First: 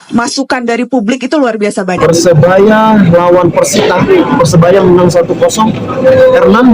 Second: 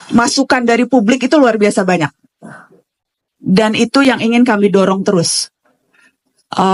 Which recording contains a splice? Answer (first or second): first